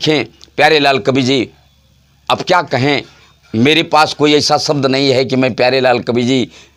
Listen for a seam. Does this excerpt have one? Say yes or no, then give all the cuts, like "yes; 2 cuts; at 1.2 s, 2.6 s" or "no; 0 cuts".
no; 0 cuts